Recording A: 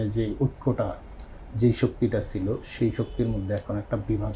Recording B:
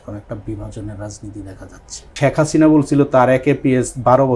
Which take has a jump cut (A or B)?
B